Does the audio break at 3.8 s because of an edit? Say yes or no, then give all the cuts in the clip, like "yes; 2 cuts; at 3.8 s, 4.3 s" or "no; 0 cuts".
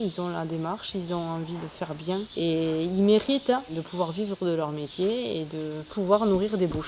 yes; 3 cuts; at 2.3 s, 3.8 s, 6.0 s